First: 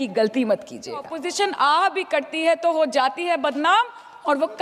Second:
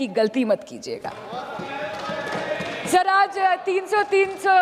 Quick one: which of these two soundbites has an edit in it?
first; 1 cut; at 1.1 s

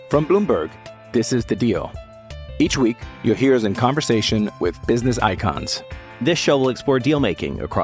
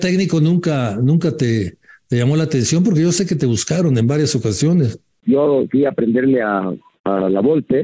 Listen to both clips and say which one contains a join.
second; 2 cuts; at 5.2 s, 6.9 s

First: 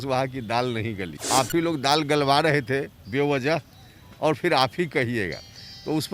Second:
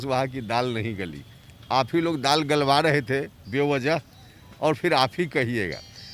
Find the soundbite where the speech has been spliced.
first; 1 cut; at 1.1 s

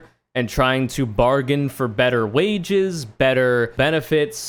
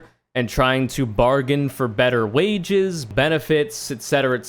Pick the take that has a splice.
second; 1 cut; at 3.1 s

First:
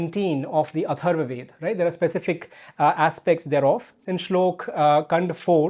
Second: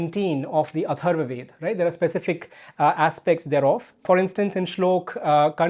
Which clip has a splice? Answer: first; 1 cut; at 4.0 s

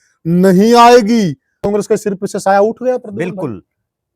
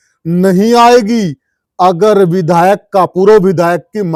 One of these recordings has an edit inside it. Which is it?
first; 1 cut; at 1.7 s

